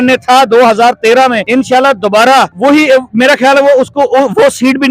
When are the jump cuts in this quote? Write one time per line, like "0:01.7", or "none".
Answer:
0:01.4
0:02.5